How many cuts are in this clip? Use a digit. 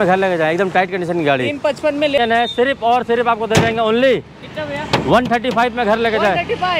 1